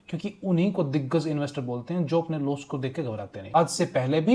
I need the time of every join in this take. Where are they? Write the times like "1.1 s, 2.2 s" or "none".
3.4 s

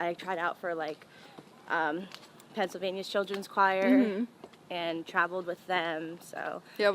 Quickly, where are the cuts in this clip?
none

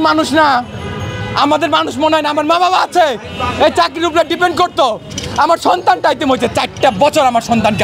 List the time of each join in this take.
none

